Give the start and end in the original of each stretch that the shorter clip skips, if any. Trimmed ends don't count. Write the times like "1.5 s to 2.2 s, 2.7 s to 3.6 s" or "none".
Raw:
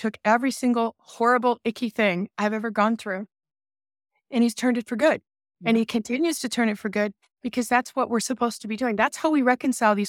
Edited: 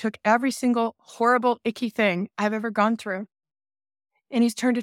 none